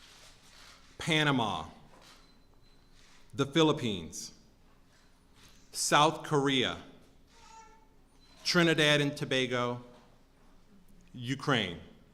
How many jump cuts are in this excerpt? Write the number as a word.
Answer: one